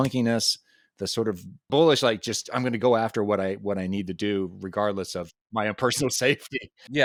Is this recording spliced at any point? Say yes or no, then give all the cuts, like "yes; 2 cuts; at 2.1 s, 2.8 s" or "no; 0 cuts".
no; 0 cuts